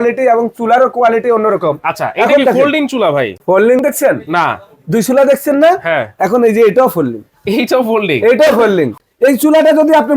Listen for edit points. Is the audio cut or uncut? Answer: cut